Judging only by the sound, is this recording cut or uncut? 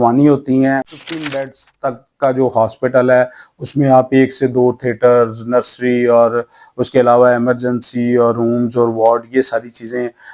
cut